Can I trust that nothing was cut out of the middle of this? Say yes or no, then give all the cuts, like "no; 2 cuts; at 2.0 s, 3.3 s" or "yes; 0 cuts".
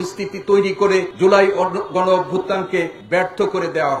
no; 2 cuts; at 1.1 s, 3.0 s